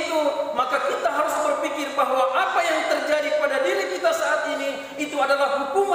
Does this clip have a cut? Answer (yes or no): no